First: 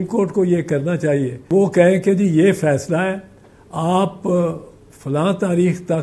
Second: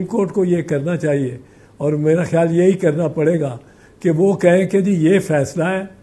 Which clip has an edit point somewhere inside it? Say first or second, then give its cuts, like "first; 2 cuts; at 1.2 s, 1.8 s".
first; 1 cut; at 1.5 s